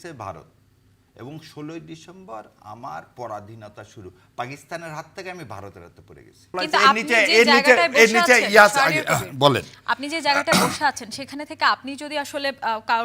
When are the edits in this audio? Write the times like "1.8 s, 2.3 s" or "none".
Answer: 6.4 s